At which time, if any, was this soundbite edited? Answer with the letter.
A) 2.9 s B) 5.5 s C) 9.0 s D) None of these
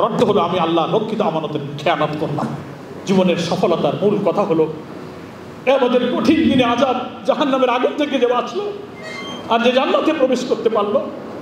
A